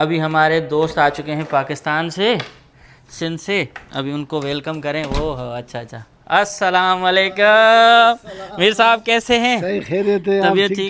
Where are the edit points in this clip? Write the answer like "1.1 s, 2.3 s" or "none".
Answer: none